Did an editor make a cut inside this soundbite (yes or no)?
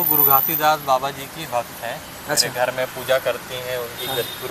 no